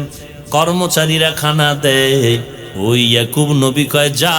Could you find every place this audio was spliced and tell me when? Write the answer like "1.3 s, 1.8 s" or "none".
2.6 s